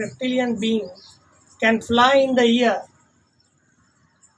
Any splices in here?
no; 0 cuts

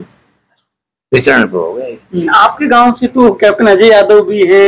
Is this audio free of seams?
no; 1 cut; at 2.3 s

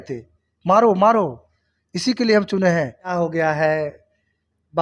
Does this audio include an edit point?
yes; 1 cut; at 3.1 s

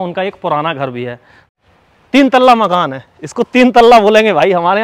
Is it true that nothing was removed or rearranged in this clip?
no; 1 cut; at 1.7 s

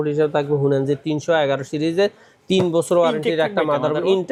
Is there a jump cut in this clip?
no; 0 cuts

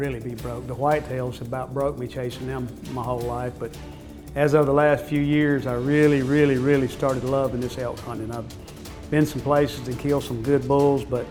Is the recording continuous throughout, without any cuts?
yes; 0 cuts

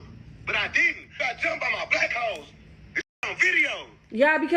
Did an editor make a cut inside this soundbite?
yes; 1 cut; at 1.1 s

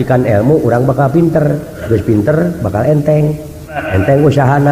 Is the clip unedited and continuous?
no; 2 cuts; at 1.8 s, 3.8 s

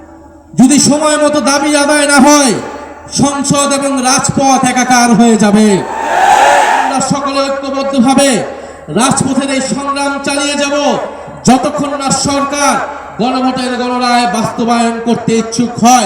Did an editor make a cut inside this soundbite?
yes; 1 cut; at 6.9 s

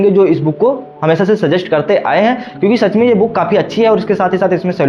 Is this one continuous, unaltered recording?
yes; 0 cuts

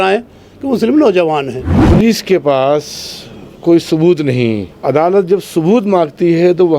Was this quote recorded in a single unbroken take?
no; 2 cuts; at 1.8 s, 4.7 s

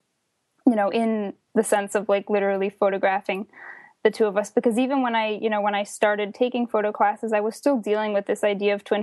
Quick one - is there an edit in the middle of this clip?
no; 0 cuts

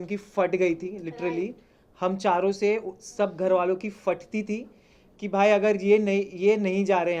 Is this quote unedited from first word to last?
yes; 0 cuts

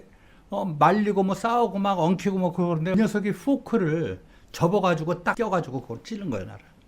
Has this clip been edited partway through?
yes; 2 cuts; at 2.9 s, 5.3 s

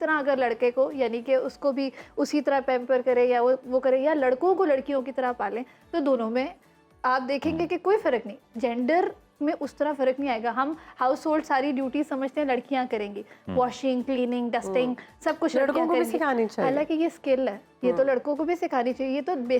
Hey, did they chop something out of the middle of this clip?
no; 0 cuts

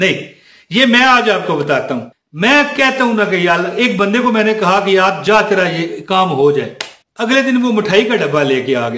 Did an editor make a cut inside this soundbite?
yes; 1 cut; at 2.1 s

